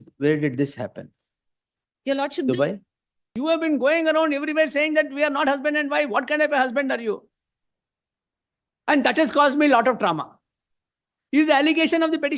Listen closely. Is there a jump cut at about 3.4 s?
yes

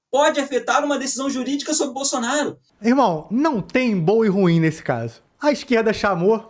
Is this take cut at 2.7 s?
yes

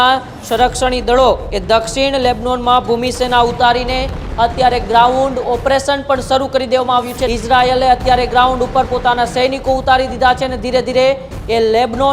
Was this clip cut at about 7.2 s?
yes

